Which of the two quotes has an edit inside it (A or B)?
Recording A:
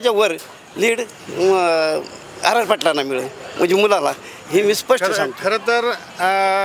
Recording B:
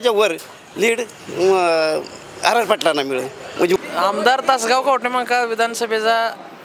B